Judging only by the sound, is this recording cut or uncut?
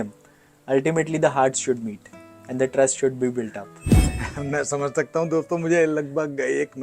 cut